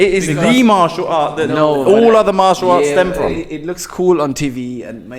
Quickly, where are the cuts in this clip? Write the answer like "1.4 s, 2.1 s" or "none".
none